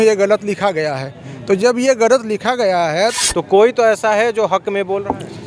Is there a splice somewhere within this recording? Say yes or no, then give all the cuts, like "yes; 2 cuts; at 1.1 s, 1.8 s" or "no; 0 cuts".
yes; 1 cut; at 3.1 s